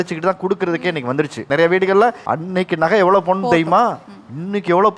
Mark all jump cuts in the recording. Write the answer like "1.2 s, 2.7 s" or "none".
1.4 s, 2.2 s